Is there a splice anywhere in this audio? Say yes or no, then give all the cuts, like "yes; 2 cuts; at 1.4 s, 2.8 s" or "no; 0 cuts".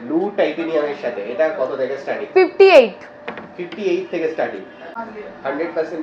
yes; 1 cut; at 5.0 s